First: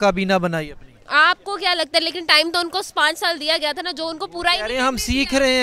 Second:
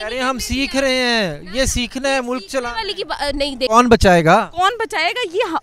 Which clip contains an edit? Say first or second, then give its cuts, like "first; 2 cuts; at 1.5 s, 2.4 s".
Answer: second; 1 cut; at 3.7 s